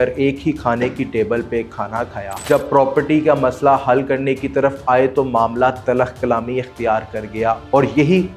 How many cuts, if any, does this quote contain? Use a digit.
1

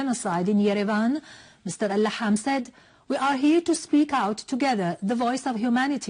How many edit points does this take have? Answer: 1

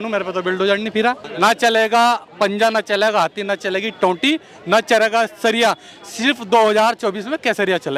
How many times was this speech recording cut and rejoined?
1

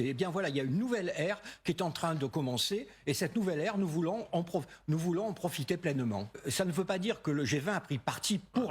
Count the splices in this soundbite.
1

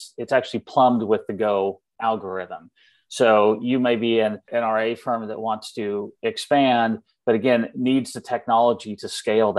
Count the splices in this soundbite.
1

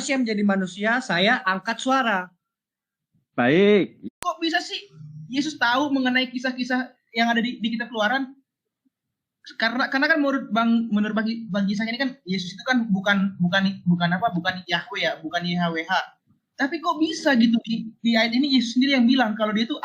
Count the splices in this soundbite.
1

